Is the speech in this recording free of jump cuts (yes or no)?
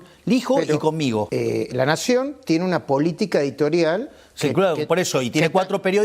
no